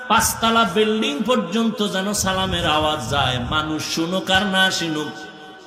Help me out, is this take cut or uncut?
uncut